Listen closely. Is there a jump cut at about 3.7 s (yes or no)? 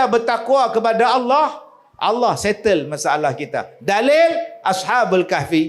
no